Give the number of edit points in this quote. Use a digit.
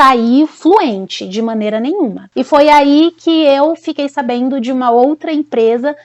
1